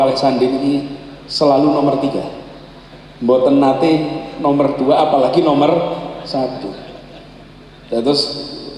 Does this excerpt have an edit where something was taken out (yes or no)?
no